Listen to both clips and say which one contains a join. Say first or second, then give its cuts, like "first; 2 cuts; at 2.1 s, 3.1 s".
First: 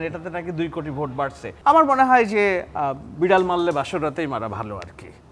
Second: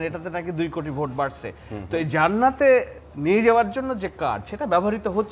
first; 1 cut; at 1.5 s